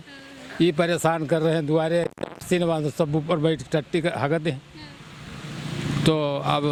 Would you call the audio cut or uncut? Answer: uncut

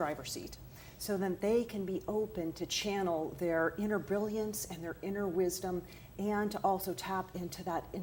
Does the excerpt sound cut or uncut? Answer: uncut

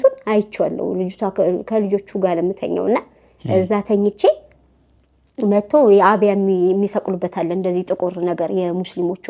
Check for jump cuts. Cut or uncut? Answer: uncut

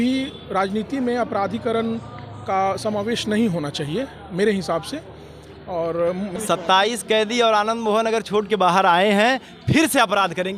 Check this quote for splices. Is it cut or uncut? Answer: cut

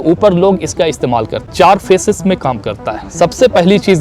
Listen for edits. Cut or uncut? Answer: cut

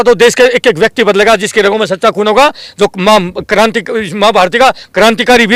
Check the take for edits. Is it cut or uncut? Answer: uncut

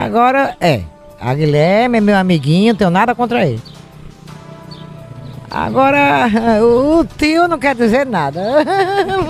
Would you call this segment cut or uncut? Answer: uncut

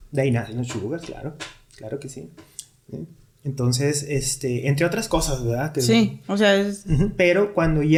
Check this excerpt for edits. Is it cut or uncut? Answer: uncut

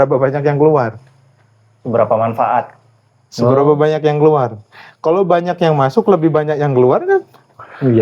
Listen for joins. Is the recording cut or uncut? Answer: uncut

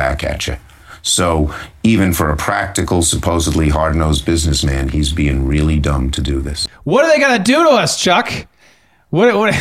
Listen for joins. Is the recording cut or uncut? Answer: cut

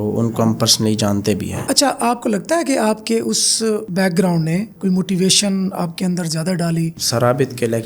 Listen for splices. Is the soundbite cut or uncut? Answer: cut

